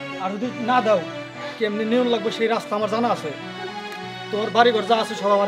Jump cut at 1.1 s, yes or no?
no